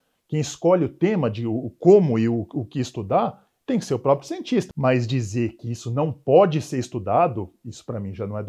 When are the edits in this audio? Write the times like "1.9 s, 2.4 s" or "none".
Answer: 4.7 s